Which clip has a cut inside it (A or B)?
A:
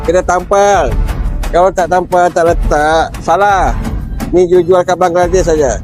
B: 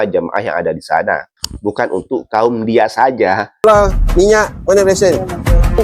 B